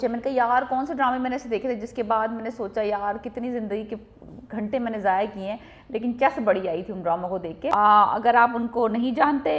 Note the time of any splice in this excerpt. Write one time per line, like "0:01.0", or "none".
0:07.7